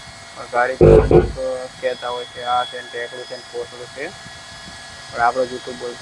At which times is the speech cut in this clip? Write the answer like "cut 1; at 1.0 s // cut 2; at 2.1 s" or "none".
none